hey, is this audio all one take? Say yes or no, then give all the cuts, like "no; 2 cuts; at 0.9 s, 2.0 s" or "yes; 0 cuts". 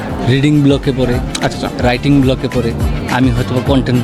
yes; 0 cuts